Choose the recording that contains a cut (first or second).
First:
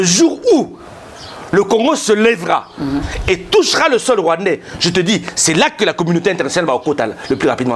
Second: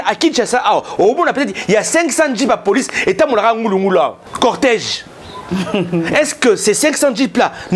second